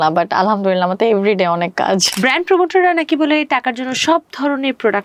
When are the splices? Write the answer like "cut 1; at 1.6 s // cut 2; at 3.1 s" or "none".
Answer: cut 1; at 2.1 s